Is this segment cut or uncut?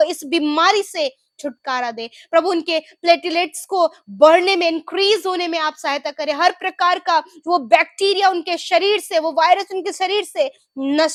uncut